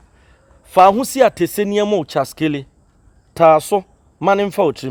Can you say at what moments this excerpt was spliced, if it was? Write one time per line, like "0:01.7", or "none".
none